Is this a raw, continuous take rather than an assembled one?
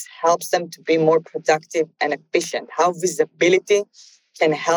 yes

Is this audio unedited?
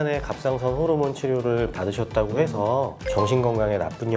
yes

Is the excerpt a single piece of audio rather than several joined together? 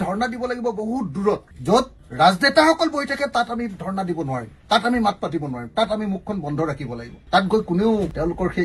yes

